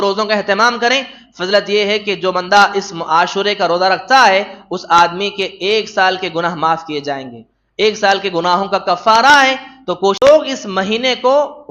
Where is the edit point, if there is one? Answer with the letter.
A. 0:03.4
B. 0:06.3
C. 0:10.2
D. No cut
C